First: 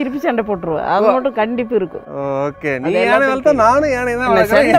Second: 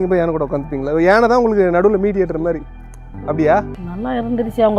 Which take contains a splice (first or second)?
second